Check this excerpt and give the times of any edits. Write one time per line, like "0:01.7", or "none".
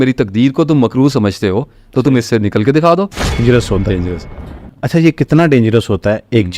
0:03.4